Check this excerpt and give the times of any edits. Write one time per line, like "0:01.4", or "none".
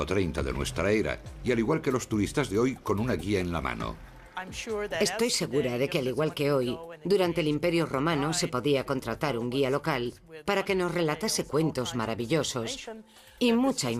0:11.2